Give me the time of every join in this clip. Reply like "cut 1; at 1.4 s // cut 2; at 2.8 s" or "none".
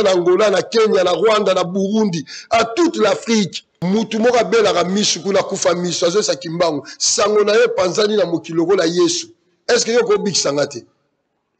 cut 1; at 3.7 s

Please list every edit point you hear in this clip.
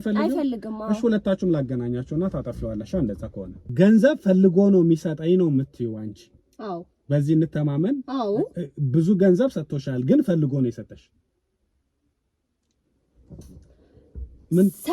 cut 1; at 3.6 s

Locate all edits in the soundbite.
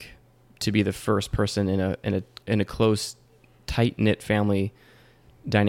cut 1; at 2.4 s

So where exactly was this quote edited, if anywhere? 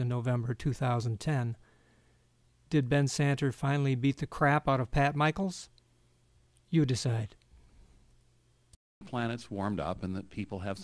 cut 1; at 2.4 s

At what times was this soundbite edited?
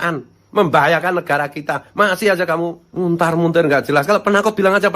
cut 1; at 2.8 s

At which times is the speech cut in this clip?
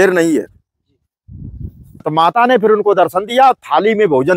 cut 1; at 2.1 s

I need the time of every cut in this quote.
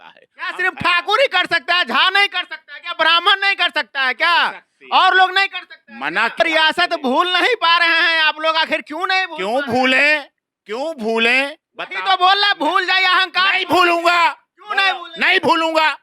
cut 1; at 6.4 s

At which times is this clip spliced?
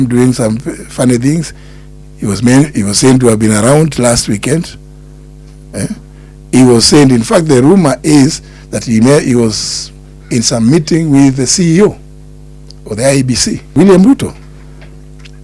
cut 1; at 13.6 s

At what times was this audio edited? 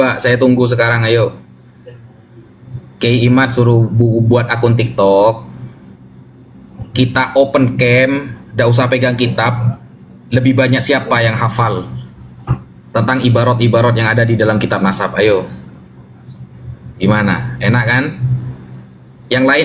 none

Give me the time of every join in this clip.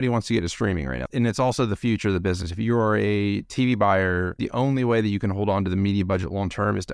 cut 1; at 1.1 s // cut 2; at 4.4 s

